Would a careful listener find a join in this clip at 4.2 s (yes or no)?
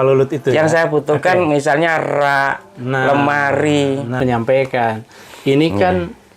yes